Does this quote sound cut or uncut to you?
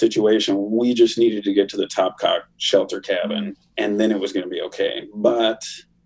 cut